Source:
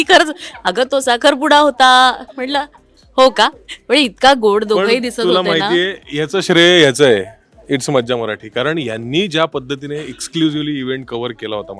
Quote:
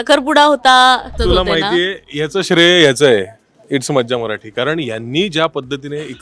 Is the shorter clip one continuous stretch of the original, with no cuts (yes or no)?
no